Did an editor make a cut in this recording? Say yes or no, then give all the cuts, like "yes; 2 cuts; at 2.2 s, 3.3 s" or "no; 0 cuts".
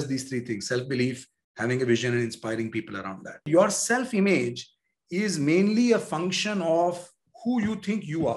yes; 1 cut; at 3.5 s